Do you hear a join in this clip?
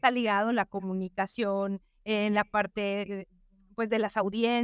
no; 0 cuts

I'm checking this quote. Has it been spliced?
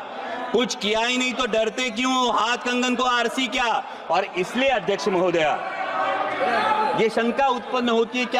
no; 0 cuts

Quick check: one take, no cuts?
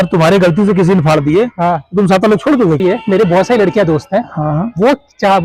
no; 1 cut; at 2.8 s

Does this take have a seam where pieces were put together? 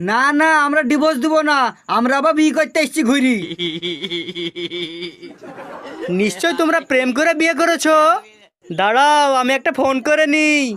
no; 0 cuts

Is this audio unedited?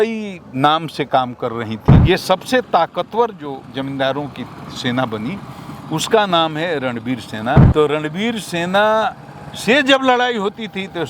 no; 2 cuts; at 2.0 s, 7.7 s

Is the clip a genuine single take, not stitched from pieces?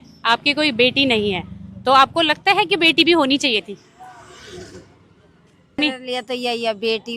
no; 1 cut; at 5.8 s

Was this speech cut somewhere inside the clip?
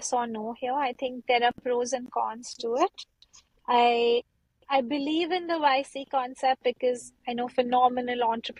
no; 0 cuts

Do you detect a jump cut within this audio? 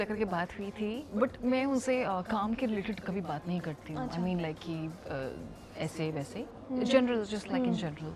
no; 0 cuts

